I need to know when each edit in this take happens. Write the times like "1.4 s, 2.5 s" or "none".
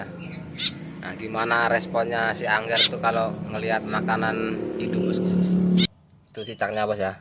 5.9 s